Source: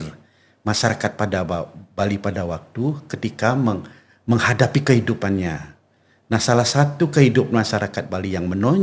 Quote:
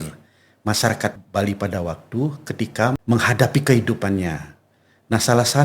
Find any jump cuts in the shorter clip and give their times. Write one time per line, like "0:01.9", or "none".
0:01.1
0:02.9